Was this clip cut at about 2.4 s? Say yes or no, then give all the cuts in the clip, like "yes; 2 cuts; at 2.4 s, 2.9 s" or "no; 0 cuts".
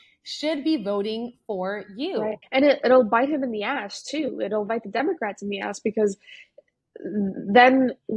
yes; 1 cut; at 2.4 s